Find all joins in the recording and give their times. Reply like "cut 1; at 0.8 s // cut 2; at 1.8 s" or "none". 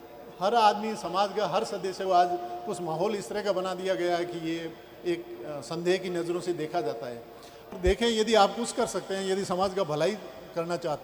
cut 1; at 7.7 s

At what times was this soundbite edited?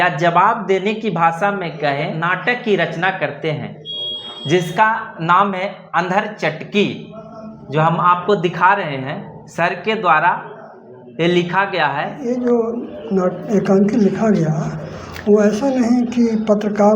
cut 1; at 2.1 s // cut 2; at 12.2 s

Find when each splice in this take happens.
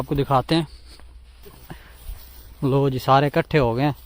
cut 1; at 1.4 s

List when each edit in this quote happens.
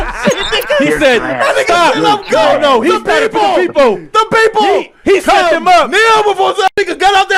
none

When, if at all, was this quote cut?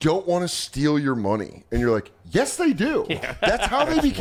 none

